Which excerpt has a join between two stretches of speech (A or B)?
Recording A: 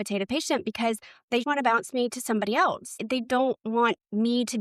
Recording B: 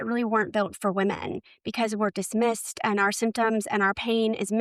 A